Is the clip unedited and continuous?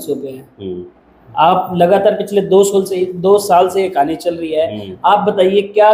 yes; 0 cuts

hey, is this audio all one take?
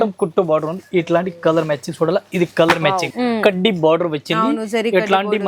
no; 1 cut; at 3.1 s

